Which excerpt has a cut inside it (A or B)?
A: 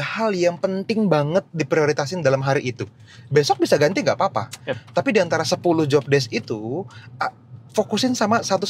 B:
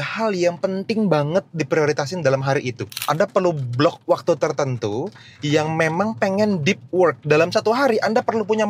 B